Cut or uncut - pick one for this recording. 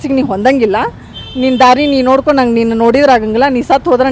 uncut